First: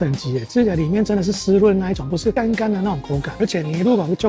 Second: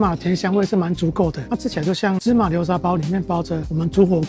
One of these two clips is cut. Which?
first; 1 cut; at 3.3 s

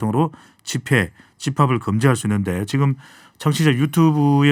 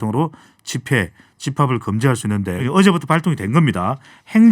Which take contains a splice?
second; 1 cut; at 2.6 s

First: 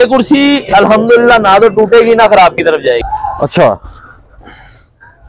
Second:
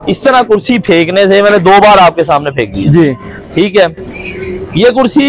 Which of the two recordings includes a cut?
first; 1 cut; at 3.0 s

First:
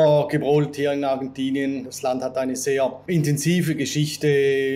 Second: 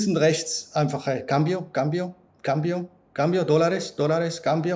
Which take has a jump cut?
first; 2 cuts; at 1.8 s, 3.0 s

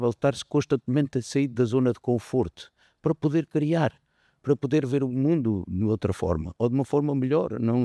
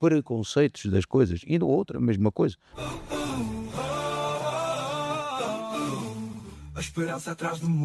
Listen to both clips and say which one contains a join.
second; 1 cut; at 2.7 s

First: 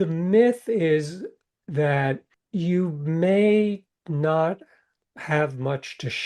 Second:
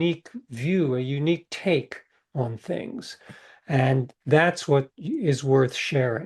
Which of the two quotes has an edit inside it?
first; 2 cuts; at 2.3 s, 5.1 s

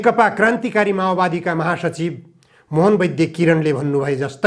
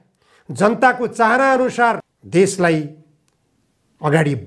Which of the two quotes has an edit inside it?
second; 1 cut; at 2.1 s

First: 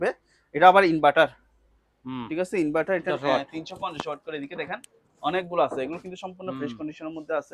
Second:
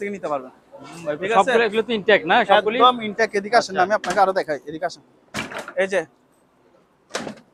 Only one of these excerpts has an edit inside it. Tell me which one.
first; 1 cut; at 3.1 s

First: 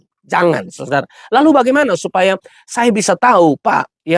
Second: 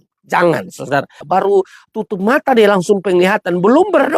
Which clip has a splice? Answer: second; 1 cut; at 1.2 s

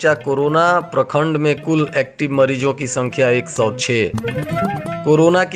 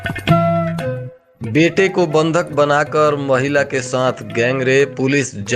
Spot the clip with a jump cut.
second; 1 cut; at 1.0 s

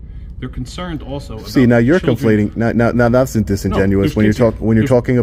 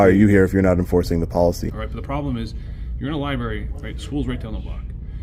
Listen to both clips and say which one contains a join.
second; 1 cut; at 1.7 s

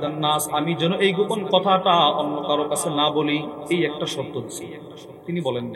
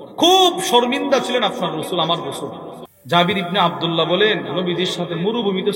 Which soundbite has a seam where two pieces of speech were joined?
second; 1 cut; at 2.7 s

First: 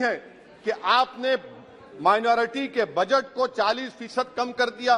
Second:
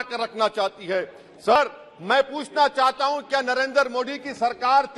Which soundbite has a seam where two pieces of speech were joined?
second; 1 cut; at 1.6 s

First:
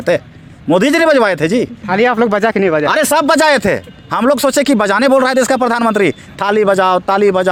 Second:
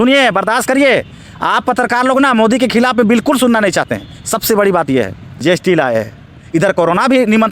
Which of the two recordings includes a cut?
second; 1 cut; at 5.2 s

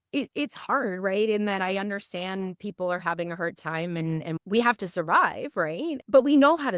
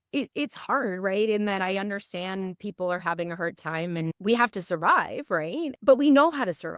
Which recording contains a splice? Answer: second; 1 cut; at 4.1 s

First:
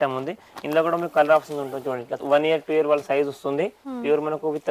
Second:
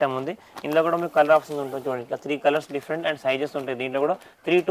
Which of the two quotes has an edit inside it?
first; 1 cut; at 2.2 s

